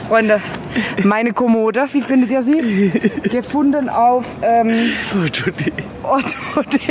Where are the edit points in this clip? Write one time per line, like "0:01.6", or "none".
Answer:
none